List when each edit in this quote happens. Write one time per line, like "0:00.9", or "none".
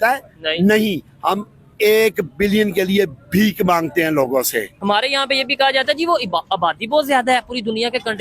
0:04.7